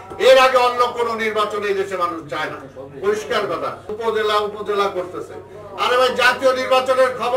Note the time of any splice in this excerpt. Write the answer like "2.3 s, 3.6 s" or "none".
3.9 s